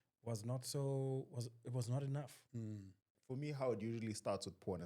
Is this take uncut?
no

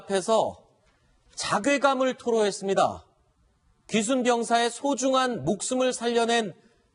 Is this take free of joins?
yes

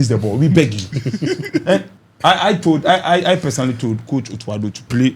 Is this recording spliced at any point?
yes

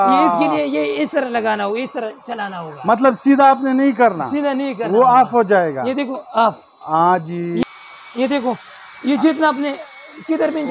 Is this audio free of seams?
no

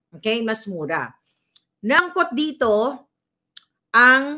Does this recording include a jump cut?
yes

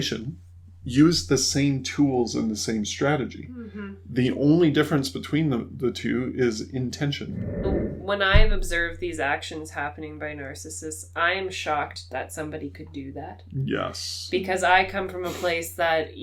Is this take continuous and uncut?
no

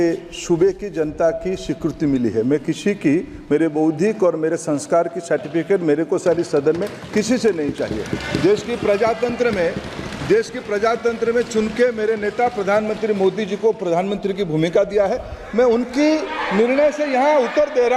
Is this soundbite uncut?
yes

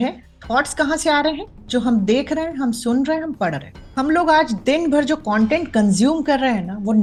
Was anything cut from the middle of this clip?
no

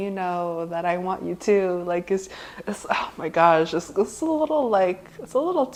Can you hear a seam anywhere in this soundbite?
no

